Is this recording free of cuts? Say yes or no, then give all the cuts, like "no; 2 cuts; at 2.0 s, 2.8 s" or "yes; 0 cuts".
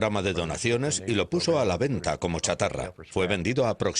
yes; 0 cuts